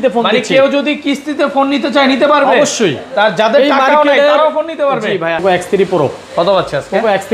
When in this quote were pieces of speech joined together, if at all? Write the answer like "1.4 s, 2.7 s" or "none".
5.4 s